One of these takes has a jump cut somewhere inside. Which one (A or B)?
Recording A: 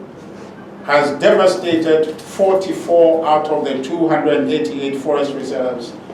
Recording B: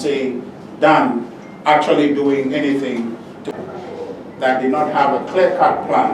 B